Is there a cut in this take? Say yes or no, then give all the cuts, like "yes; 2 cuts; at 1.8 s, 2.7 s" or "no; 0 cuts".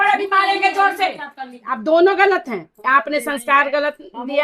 yes; 1 cut; at 1.7 s